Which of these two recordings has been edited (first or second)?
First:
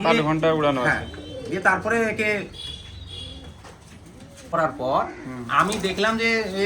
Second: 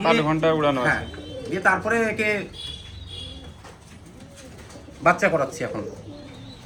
first